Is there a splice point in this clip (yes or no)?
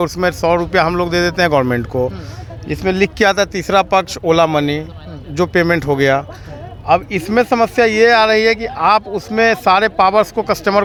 no